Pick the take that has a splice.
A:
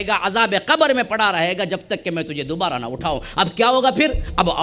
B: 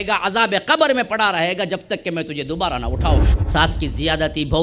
B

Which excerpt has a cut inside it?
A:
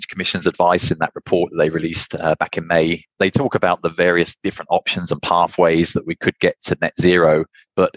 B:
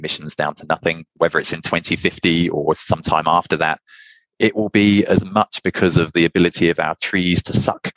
B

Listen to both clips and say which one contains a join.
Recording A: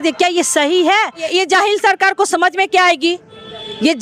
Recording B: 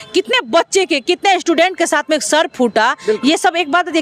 A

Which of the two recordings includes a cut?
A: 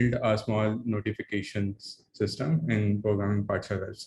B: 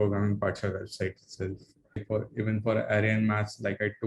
B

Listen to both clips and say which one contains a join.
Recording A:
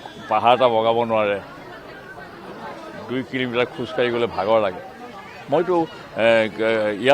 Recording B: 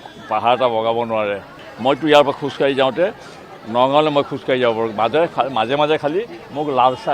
B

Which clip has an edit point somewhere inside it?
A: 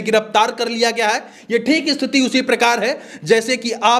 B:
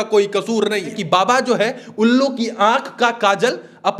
B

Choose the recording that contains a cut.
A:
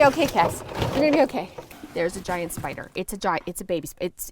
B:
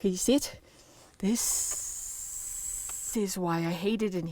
A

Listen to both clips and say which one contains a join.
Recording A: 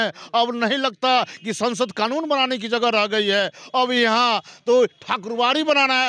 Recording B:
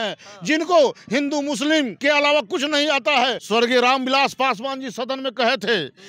B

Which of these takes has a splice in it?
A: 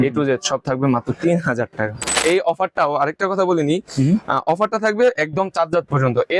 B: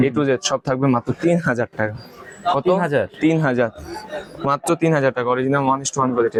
A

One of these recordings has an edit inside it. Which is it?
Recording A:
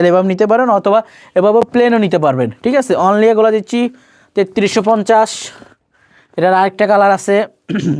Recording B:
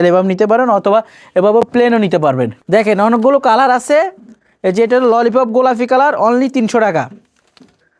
B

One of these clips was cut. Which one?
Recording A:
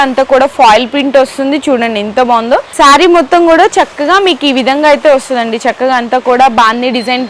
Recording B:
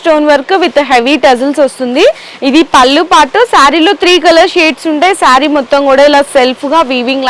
A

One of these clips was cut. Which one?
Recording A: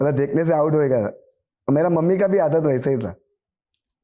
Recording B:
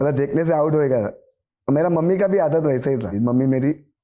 B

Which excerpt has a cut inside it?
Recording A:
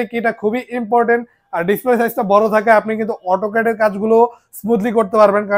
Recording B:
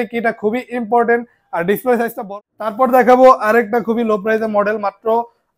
B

